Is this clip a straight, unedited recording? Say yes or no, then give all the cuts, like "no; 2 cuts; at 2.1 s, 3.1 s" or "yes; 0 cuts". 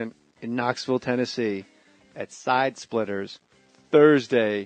no; 1 cut; at 2.4 s